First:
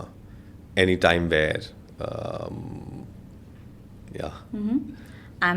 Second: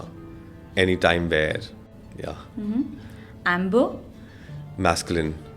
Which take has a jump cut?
second; 1 cut; at 1.8 s

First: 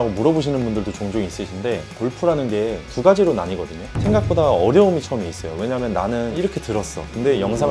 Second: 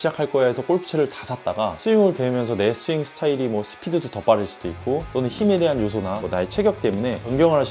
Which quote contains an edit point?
first; 1 cut; at 3.9 s

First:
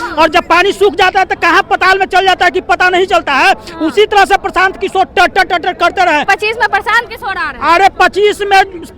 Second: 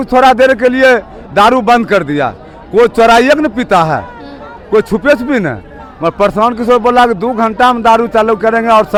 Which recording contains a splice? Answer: first; 1 cut; at 6.3 s

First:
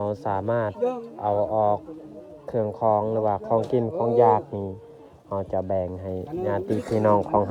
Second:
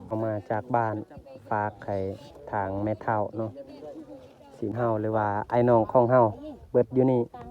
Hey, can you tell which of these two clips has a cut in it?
second; 1 cut; at 4.7 s

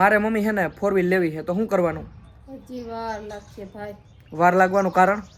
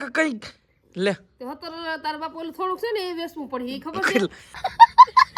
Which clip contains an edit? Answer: second; 1 cut; at 4.5 s

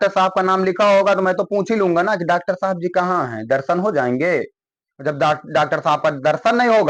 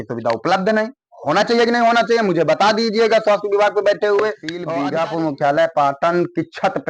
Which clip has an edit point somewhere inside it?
second; 1 cut; at 4.6 s

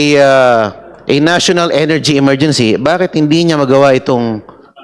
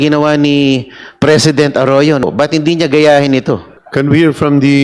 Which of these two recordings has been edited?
second; 2 cuts; at 2.2 s, 3.8 s

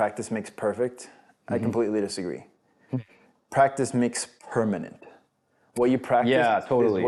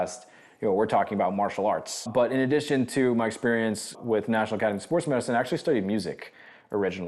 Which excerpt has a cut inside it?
second; 1 cut; at 1.9 s

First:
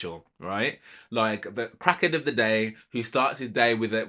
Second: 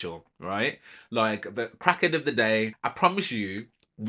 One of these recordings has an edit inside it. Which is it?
second; 1 cut; at 2.8 s

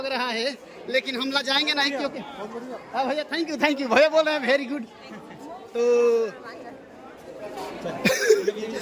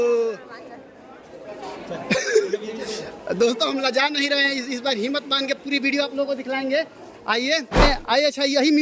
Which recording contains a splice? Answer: second; 1 cut; at 7.8 s

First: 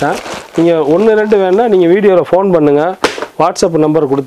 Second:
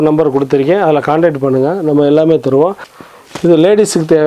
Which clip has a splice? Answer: second; 1 cut; at 2.9 s

